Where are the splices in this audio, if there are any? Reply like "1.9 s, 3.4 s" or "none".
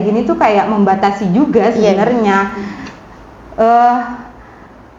none

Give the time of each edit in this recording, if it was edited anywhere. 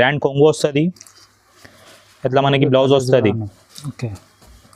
none

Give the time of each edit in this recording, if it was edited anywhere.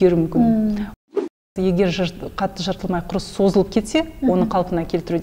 1.0 s

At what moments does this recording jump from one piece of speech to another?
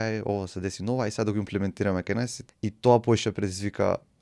2.4 s

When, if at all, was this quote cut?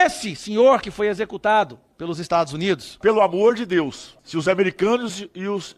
3.0 s

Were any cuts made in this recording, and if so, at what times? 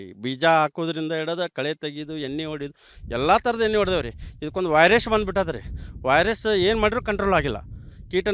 3.0 s

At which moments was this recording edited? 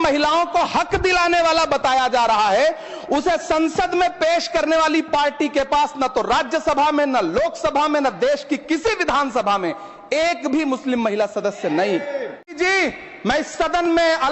12.6 s

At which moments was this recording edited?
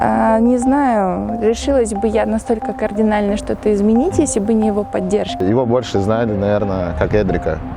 5.4 s

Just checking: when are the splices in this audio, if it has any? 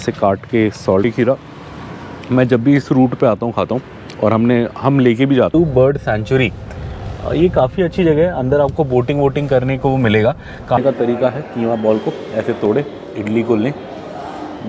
1.0 s, 5.5 s, 10.8 s

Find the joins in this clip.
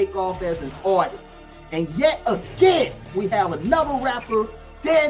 3.1 s

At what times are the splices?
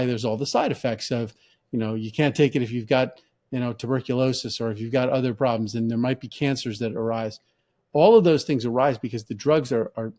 none

